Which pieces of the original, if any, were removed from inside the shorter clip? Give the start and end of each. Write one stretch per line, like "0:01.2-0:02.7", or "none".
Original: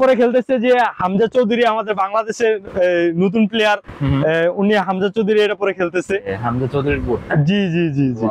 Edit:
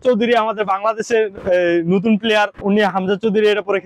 0:03.9-0:04.6